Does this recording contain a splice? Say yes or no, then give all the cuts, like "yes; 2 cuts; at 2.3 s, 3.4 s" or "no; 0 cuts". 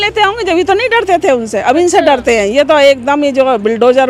no; 0 cuts